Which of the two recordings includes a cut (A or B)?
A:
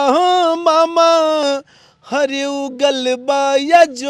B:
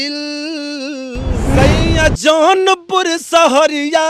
B